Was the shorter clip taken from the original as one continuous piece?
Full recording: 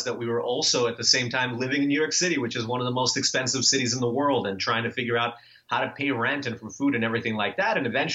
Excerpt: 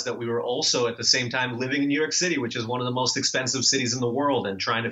yes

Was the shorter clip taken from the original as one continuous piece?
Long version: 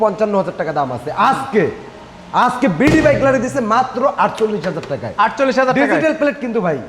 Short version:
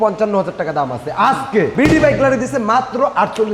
no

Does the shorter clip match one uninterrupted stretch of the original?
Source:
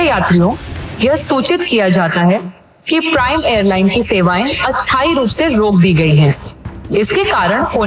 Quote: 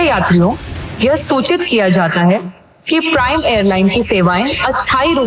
yes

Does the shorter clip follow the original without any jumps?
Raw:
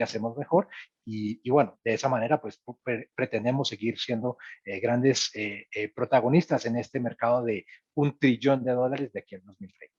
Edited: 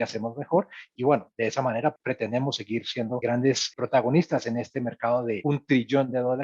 no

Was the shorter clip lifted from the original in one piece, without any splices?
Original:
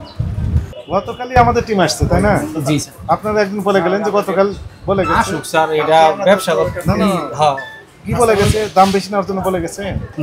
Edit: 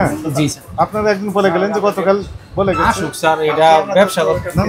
yes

